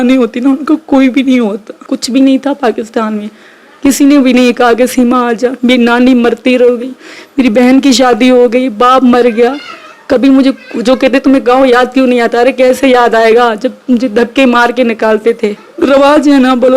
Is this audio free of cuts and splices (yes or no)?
no